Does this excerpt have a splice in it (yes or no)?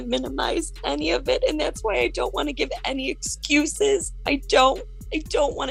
no